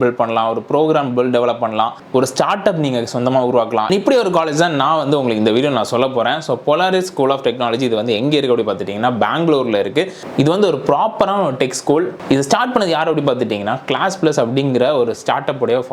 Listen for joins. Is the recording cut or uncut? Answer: uncut